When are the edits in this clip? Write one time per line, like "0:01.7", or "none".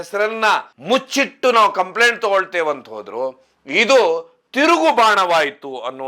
none